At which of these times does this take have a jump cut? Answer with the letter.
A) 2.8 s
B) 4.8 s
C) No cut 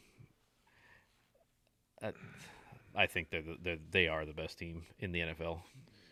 C